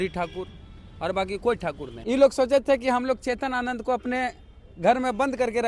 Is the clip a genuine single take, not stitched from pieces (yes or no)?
no